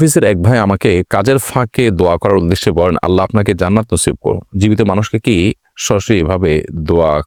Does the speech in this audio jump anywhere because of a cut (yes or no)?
no